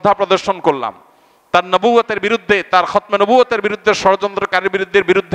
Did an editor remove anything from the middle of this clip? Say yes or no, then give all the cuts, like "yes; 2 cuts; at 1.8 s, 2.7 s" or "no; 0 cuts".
no; 0 cuts